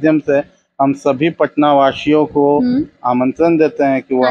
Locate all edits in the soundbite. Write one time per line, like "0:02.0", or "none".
none